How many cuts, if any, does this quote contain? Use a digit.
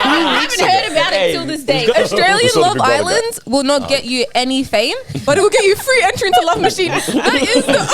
1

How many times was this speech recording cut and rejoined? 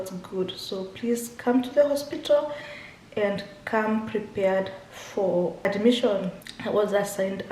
2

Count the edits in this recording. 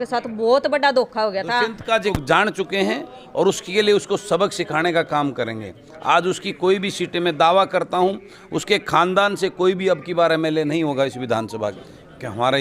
2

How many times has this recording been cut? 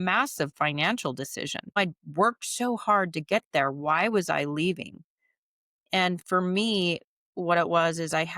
1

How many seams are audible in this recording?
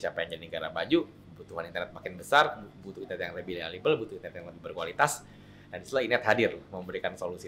0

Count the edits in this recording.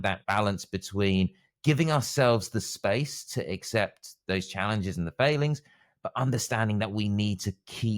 0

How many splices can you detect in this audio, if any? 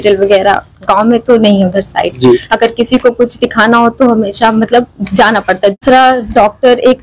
1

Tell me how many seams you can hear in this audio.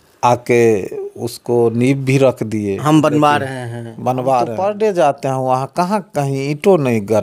1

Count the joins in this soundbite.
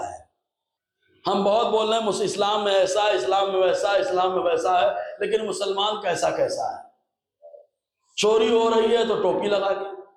0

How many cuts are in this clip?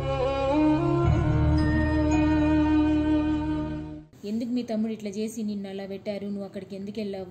1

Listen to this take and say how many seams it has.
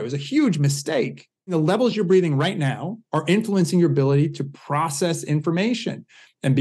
1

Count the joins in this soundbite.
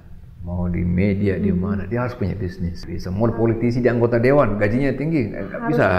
1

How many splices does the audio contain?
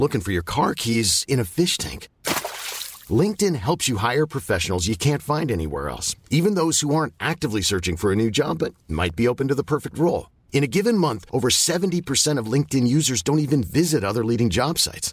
0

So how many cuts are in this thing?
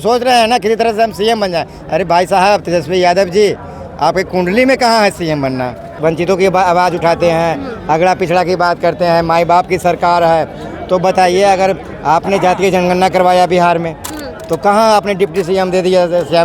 1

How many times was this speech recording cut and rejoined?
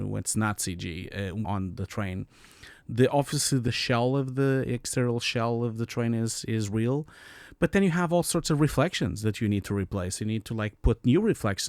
2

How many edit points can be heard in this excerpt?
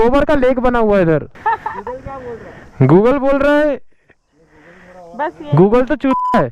1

